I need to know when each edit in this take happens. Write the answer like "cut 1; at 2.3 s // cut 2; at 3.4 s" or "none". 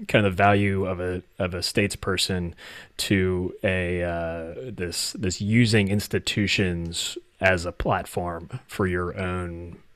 none